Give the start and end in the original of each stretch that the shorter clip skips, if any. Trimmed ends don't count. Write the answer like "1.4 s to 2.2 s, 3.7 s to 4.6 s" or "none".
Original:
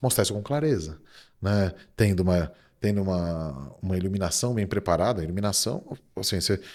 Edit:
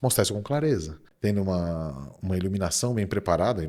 1.0 s to 2.6 s